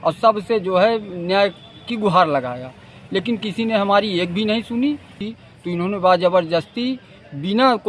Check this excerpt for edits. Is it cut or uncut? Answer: cut